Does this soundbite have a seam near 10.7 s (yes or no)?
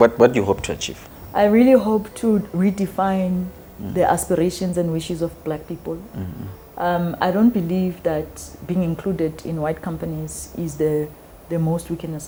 no